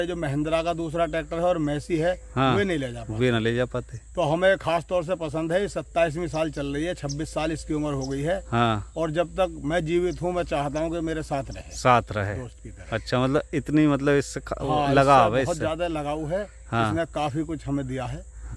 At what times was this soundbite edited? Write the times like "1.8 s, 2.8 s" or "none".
none